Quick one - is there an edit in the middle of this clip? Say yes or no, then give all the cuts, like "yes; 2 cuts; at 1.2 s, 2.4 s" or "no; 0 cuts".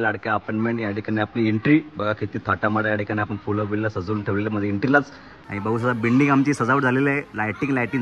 no; 0 cuts